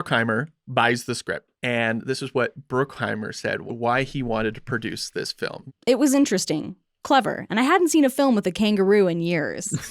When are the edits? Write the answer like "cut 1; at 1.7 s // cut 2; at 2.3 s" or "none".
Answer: cut 1; at 1.5 s // cut 2; at 3.6 s